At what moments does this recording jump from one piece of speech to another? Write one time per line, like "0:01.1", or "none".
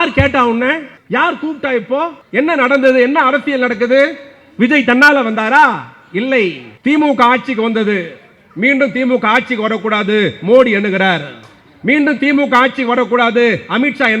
0:00.9
0:02.2
0:06.7